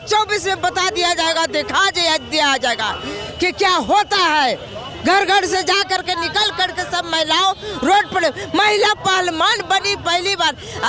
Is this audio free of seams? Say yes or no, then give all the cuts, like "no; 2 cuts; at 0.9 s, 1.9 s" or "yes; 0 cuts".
yes; 0 cuts